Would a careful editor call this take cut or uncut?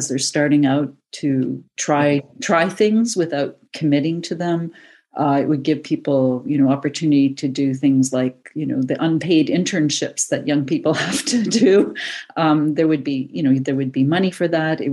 uncut